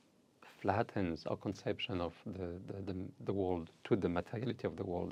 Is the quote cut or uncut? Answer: uncut